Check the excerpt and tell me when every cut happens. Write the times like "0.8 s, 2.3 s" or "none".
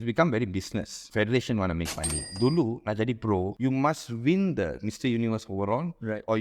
1.0 s, 2.2 s, 3.5 s